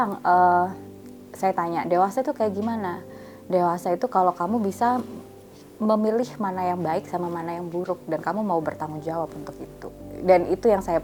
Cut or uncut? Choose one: uncut